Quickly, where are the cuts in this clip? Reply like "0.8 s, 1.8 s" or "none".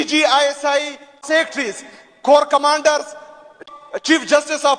1.5 s, 3.6 s